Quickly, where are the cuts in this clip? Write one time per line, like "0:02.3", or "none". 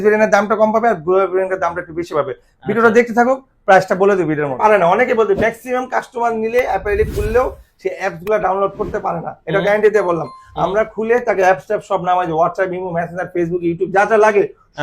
0:04.6